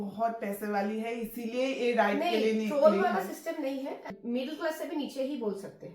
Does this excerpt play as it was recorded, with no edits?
no; 1 cut; at 4.0 s

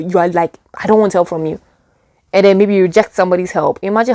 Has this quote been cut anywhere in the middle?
no; 0 cuts

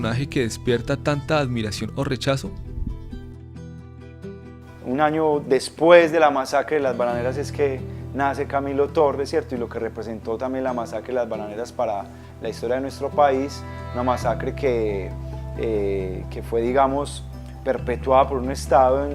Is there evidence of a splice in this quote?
yes; 1 cut; at 2.7 s

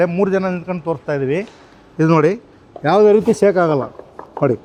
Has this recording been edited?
no; 0 cuts

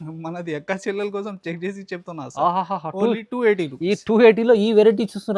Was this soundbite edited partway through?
no; 0 cuts

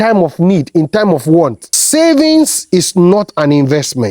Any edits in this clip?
yes; 1 cut; at 1.7 s

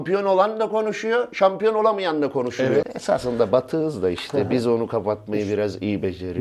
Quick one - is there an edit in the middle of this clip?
yes; 1 cut; at 2.9 s

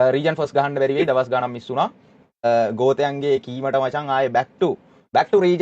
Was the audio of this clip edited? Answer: yes; 1 cut; at 2.4 s

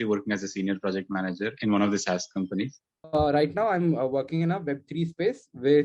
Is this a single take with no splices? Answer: no; 1 cut; at 3.0 s

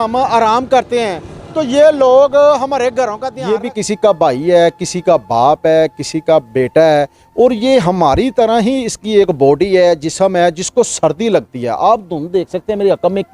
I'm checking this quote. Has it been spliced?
yes; 1 cut; at 3.3 s

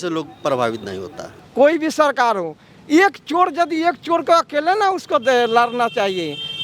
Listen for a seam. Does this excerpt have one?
yes; 1 cut; at 1.3 s

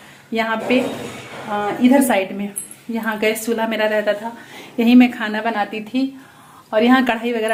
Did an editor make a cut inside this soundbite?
no; 0 cuts

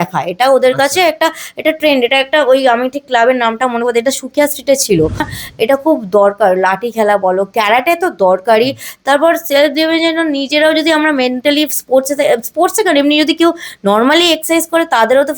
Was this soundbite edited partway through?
yes; 1 cut; at 5.3 s

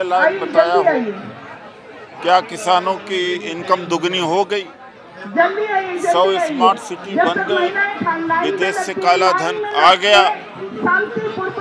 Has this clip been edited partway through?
no; 0 cuts

